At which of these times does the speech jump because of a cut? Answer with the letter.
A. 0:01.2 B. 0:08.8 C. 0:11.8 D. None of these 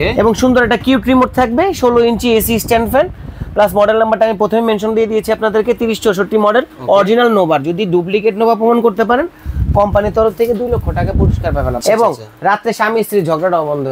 C